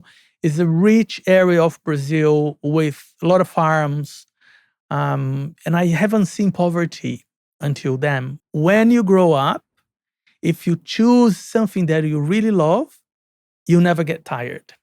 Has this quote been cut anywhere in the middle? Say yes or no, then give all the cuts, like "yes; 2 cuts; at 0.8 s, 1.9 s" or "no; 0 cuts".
yes; 1 cut; at 8.3 s